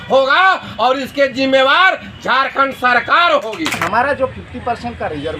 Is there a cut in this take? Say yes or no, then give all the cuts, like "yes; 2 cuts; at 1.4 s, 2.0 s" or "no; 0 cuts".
yes; 1 cut; at 3.8 s